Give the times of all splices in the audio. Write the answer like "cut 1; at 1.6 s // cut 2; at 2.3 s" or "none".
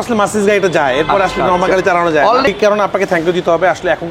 cut 1; at 2.5 s